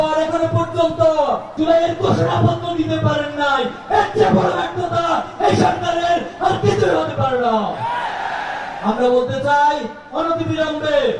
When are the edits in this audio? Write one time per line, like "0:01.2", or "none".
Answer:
0:01.5